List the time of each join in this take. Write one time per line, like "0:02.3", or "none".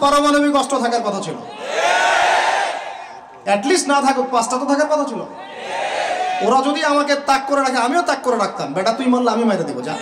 none